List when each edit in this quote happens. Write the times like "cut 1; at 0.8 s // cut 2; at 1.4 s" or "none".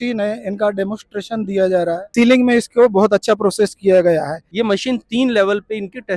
cut 1; at 2.1 s // cut 2; at 4.4 s